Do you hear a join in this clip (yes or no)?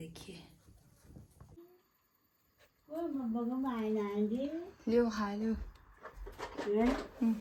no